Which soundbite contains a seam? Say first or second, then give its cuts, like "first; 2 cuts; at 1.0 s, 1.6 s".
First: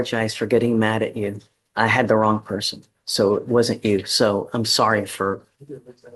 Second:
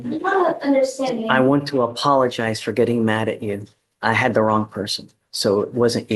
second; 1 cut; at 1.3 s